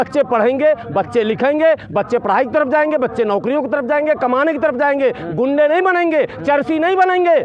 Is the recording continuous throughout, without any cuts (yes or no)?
yes